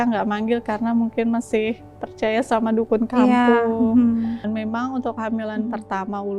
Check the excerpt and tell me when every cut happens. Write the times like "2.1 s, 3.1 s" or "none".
4.4 s